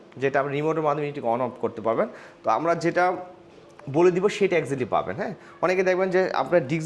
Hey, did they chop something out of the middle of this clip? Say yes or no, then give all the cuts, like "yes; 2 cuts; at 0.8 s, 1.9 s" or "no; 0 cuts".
no; 0 cuts